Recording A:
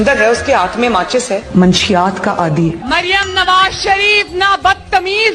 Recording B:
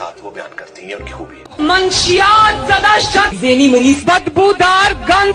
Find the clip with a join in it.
B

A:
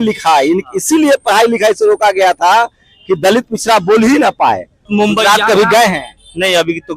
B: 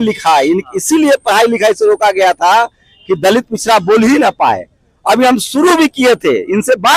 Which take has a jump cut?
A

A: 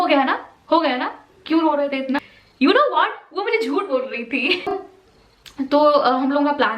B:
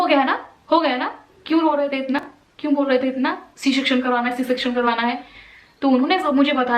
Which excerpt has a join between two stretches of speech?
A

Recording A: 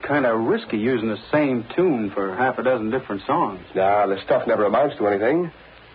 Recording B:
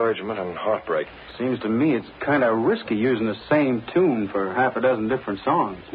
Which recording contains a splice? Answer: B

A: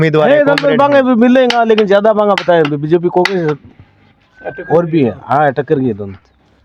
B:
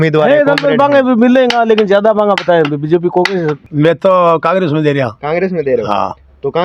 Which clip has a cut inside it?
B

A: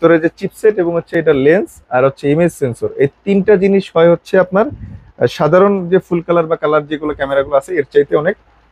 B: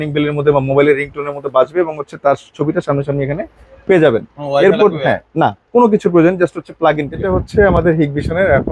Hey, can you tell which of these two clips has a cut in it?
B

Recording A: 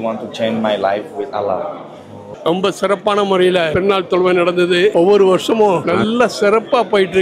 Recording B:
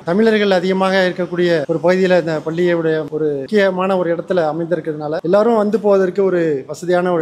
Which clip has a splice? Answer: A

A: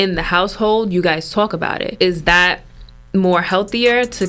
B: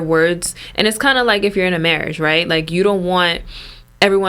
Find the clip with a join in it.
A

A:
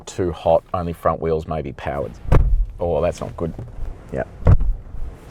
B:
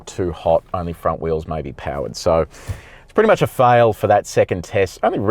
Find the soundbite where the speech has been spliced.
A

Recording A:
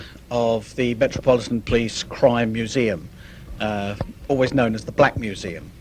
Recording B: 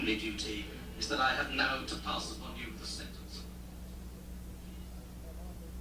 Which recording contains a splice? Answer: B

